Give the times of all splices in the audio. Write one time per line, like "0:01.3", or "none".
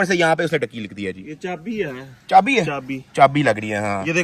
none